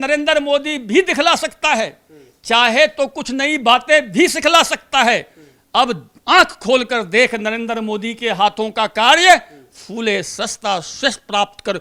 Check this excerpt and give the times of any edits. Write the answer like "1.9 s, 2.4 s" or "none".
none